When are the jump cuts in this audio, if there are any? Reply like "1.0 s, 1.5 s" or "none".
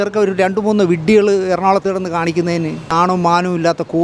2.9 s